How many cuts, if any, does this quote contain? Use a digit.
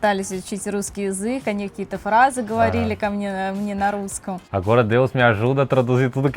1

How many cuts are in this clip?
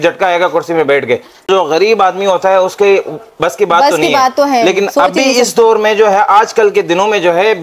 1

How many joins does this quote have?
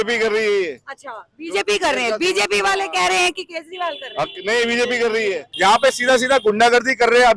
1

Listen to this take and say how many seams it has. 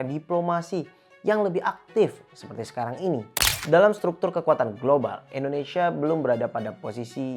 1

